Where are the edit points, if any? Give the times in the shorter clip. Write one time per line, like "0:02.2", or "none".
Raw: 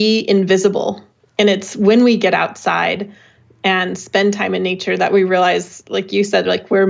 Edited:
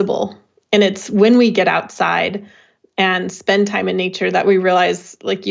none